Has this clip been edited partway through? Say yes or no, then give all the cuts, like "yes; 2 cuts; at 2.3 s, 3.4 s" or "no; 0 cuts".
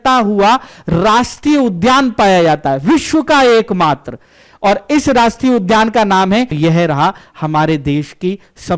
yes; 1 cut; at 6.5 s